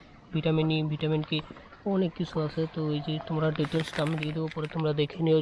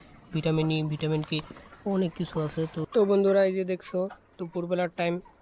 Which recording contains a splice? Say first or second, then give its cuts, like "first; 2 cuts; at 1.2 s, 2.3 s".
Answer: second; 1 cut; at 2.8 s